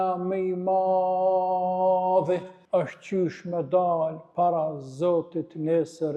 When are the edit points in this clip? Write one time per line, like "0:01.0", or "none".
0:02.5